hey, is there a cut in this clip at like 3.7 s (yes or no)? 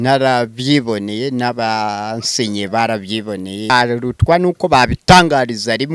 yes